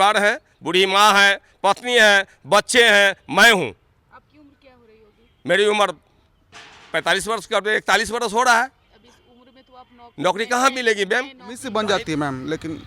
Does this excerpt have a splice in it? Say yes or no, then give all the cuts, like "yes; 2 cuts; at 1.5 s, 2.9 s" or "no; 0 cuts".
yes; 1 cut; at 11.6 s